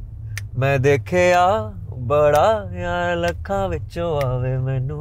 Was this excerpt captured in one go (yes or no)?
yes